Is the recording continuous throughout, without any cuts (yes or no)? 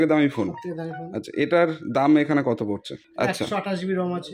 no